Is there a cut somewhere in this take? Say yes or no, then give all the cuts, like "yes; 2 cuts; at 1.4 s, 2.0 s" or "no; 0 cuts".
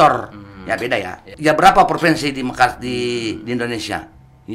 yes; 1 cut; at 1.3 s